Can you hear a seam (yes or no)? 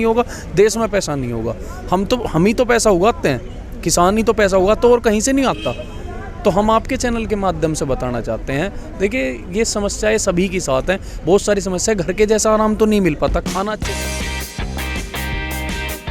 no